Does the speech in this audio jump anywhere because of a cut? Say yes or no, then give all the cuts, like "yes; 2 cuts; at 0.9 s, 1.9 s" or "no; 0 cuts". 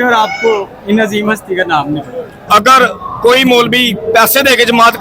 yes; 1 cut; at 2.4 s